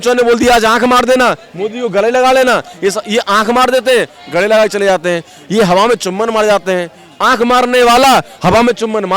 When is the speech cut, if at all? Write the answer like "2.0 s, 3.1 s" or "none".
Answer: none